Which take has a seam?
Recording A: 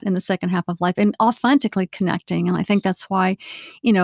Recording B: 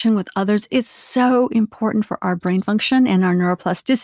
A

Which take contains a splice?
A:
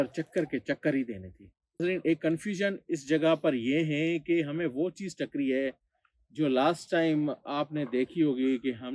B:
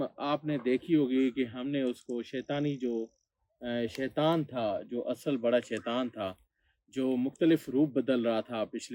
A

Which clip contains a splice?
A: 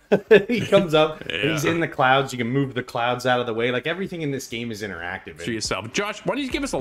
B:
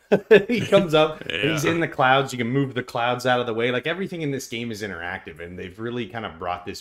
A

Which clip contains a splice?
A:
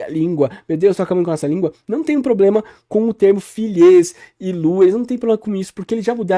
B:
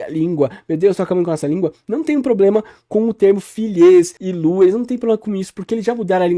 B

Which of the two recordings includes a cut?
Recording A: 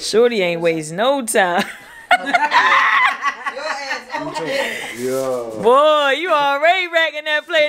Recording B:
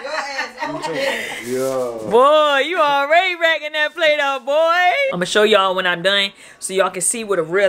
B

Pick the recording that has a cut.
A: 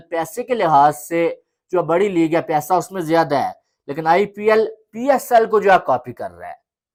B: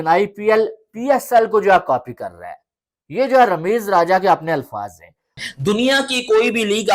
B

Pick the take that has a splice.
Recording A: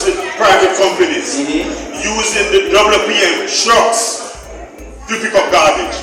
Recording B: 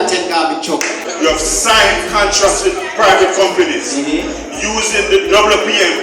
B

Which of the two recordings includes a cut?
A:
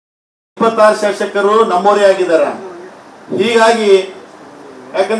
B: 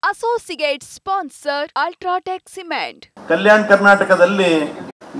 B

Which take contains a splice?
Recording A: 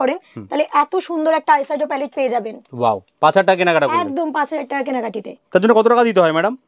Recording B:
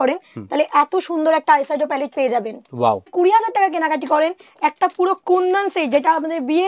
B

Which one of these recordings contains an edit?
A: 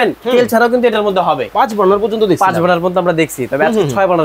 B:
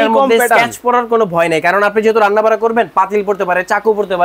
A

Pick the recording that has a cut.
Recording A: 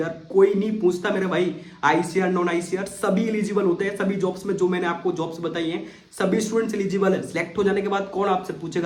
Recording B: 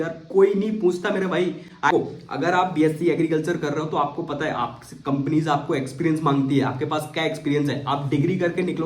B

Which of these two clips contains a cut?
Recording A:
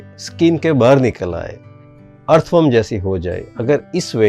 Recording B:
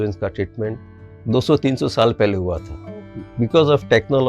B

